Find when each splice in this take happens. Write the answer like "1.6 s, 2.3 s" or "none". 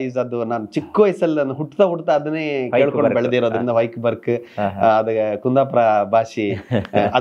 none